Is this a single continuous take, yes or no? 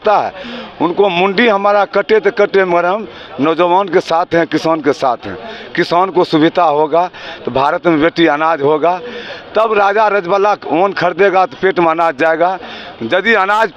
yes